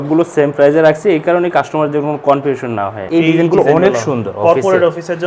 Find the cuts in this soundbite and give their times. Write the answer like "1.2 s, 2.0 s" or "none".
3.0 s